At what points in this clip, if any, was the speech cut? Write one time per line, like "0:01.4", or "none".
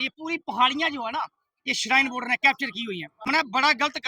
0:03.1

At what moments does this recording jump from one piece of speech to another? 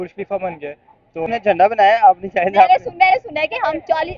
0:01.3

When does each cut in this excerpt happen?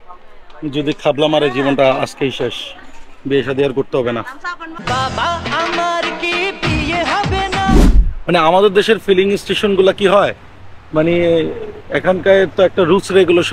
0:07.8

